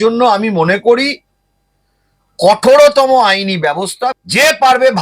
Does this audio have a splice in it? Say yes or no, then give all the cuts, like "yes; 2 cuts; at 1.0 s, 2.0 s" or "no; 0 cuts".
no; 0 cuts